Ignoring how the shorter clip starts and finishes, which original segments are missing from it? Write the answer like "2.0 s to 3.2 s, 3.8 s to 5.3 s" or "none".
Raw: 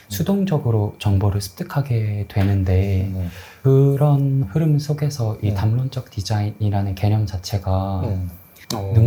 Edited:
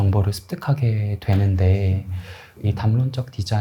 3.6 s to 5.3 s